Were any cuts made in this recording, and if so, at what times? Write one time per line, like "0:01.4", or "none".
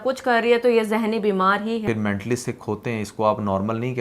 0:01.8